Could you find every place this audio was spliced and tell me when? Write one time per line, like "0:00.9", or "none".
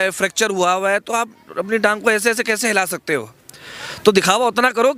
none